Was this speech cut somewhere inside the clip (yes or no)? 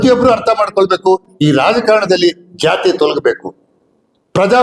no